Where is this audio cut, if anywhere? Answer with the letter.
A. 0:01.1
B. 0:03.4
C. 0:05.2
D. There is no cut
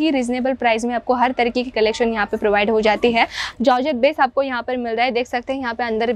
B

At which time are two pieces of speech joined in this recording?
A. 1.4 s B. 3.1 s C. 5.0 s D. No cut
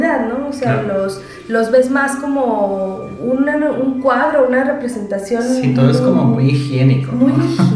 B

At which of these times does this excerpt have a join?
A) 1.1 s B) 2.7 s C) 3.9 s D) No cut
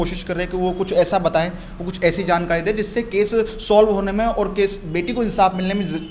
D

